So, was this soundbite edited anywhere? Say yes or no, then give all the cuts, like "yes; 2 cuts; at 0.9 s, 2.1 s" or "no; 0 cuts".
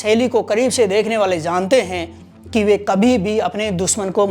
no; 0 cuts